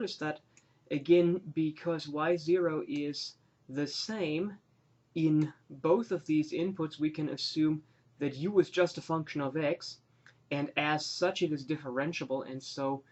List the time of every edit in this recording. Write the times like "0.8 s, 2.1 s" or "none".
11.3 s